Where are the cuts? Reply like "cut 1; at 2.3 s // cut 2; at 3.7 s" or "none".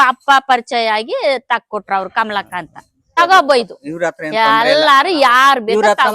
cut 1; at 3.1 s